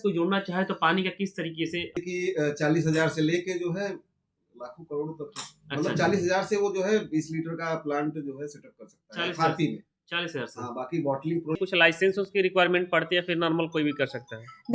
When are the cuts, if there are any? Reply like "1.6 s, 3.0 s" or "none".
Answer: 1.9 s, 11.6 s